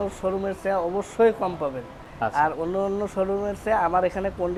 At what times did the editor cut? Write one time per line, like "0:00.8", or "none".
none